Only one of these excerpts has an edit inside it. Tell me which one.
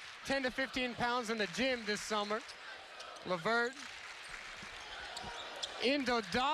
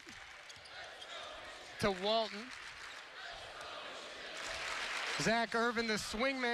second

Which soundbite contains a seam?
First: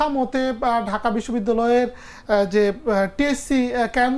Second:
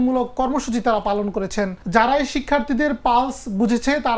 second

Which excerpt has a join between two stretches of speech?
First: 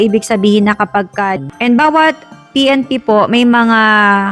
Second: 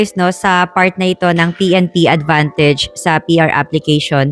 first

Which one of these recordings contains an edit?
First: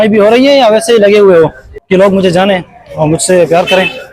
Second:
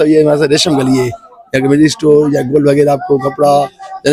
first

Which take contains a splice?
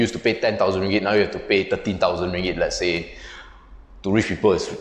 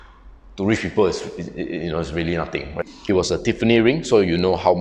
second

